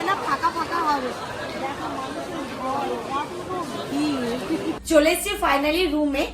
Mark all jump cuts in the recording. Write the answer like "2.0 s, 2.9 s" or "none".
4.8 s